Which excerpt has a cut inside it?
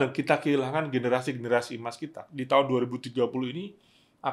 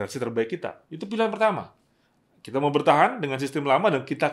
first; 1 cut; at 2.3 s

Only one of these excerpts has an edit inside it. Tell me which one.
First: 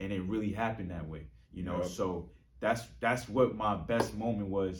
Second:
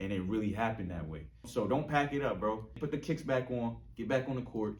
second; 2 cuts; at 1.5 s, 2.8 s

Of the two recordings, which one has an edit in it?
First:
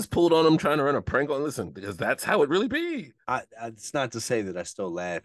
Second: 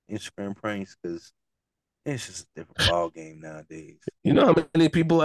first; 1 cut; at 3.2 s

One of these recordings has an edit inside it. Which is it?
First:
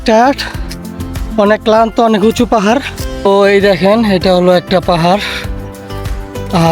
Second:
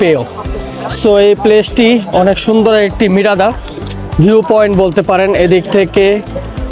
first; 1 cut; at 3.0 s

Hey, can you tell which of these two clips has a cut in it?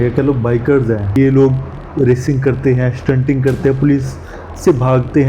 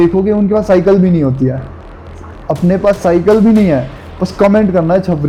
first; 1 cut; at 1.2 s

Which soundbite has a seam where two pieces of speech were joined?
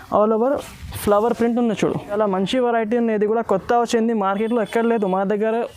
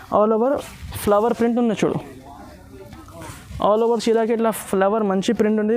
first; 1 cut; at 2.2 s

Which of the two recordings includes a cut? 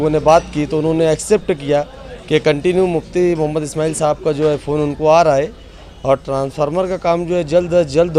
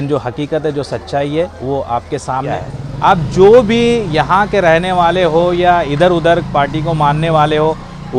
second; 1 cut; at 2.5 s

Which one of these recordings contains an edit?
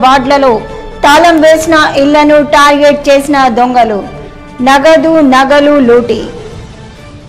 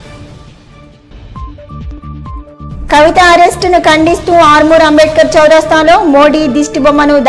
second; 1 cut; at 2.1 s

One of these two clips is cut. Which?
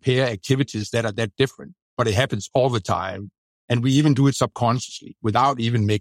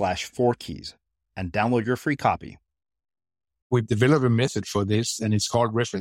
second; 1 cut; at 3.7 s

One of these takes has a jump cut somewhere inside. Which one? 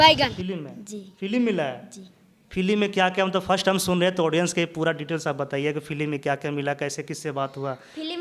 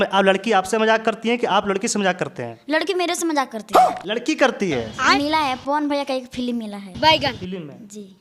second; 1 cut; at 5.0 s

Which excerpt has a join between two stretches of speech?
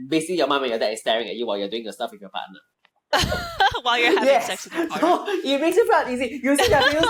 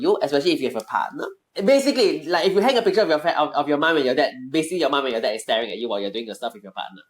second; 1 cut; at 1.4 s

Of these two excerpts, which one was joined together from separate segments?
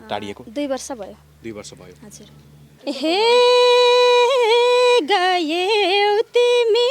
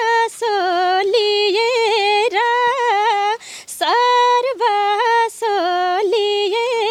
first; 1 cut; at 2.8 s

